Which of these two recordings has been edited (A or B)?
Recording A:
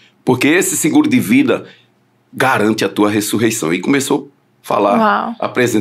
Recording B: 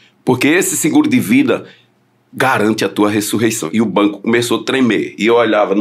B